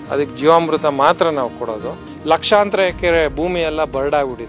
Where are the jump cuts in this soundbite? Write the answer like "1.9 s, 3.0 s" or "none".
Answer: 2.0 s